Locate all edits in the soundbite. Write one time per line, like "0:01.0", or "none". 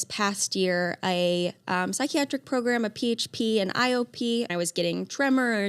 0:04.5